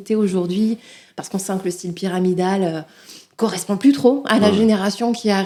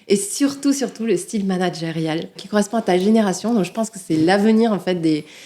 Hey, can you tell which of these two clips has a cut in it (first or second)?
second